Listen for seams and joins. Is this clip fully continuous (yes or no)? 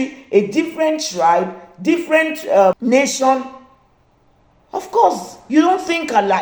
no